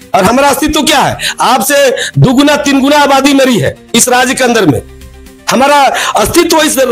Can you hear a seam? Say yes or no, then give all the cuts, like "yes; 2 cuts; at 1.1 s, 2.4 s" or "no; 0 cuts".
no; 0 cuts